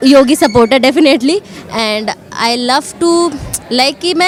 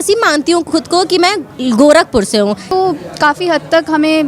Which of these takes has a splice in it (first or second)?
second